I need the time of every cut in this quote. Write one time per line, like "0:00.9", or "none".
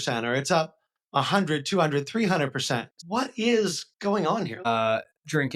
0:03.0
0:04.7